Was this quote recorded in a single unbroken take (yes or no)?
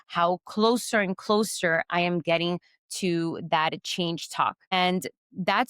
no